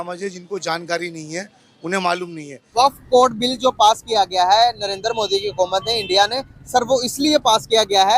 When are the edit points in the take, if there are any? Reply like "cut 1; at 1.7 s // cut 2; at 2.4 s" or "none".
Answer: cut 1; at 2.6 s